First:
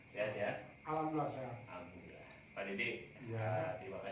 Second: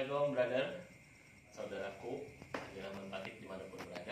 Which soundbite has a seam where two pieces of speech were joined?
second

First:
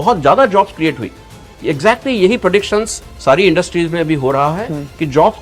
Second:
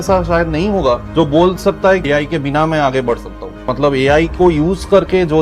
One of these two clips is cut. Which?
second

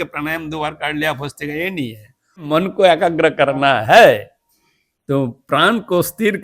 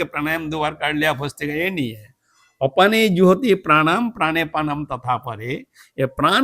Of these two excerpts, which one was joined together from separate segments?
first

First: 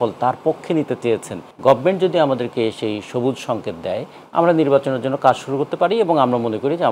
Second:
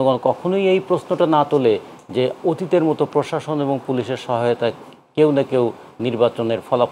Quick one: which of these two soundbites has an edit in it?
first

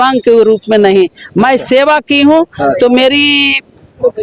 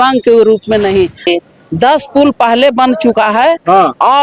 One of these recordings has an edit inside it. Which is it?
second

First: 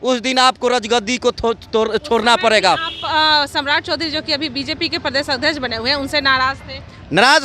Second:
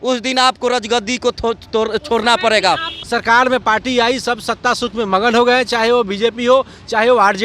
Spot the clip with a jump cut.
second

